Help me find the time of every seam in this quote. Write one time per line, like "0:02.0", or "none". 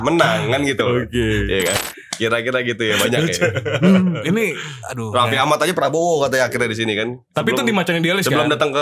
0:01.8

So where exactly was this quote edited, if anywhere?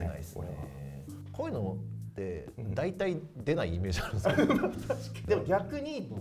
0:05.2

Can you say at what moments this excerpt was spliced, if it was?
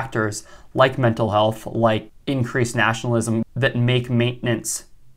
0:02.1
0:03.4

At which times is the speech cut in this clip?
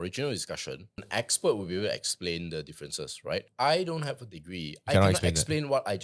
0:01.0
0:03.5

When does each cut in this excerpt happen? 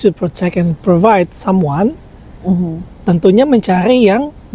none

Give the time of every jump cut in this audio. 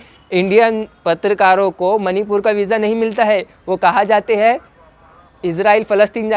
none

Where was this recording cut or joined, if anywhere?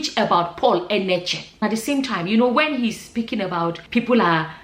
0:01.6

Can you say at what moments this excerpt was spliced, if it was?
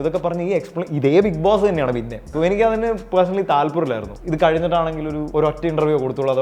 0:02.2
0:04.1
0:05.2

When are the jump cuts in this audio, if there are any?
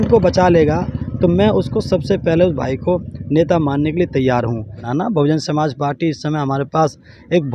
0:04.8

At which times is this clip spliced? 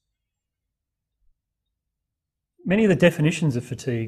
none

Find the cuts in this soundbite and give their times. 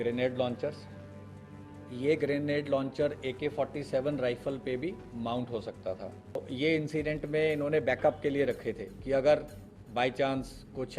0:06.4

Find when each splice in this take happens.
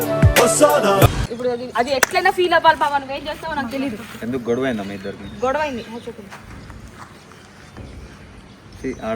0:01.3

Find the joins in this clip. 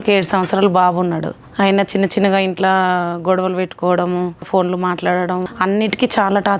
0:01.4
0:04.5
0:05.5

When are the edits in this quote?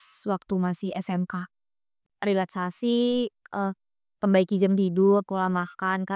0:02.2

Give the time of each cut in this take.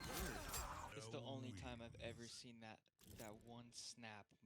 0:00.9

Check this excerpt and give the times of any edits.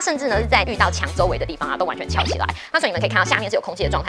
0:02.6

